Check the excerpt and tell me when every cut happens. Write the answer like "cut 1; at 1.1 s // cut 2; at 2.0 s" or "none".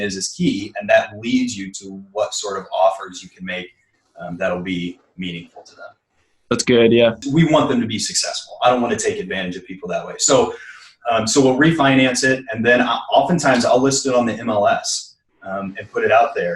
cut 1; at 7.2 s